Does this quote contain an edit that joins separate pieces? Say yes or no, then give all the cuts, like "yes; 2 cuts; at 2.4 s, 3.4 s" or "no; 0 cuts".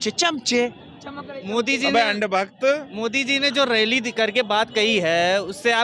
no; 0 cuts